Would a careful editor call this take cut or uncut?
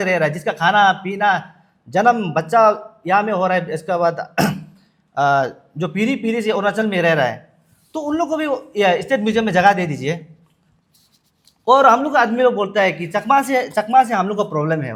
uncut